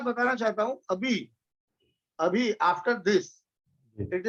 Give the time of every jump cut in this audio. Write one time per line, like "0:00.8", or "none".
none